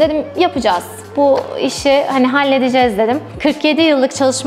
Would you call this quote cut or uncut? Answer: cut